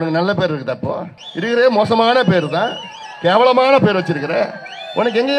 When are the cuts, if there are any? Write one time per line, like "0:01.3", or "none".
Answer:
0:01.2